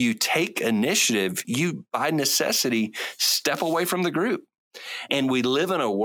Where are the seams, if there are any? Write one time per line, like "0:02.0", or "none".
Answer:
0:01.5
0:05.1